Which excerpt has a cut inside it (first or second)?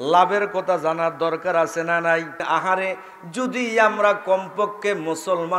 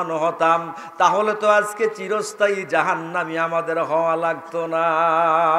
first